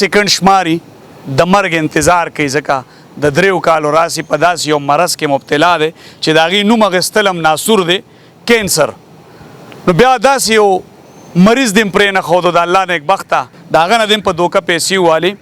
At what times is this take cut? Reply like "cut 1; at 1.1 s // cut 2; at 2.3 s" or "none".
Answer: cut 1; at 13.5 s